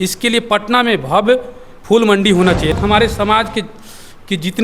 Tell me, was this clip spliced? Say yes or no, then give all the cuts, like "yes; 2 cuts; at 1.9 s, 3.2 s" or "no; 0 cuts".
yes; 1 cut; at 2.7 s